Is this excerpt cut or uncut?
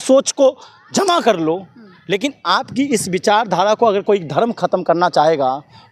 uncut